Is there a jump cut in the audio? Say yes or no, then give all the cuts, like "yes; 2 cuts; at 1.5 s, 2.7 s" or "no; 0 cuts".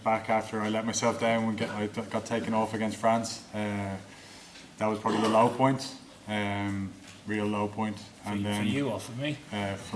no; 0 cuts